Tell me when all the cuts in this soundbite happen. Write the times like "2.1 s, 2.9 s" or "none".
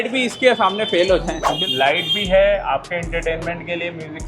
1.4 s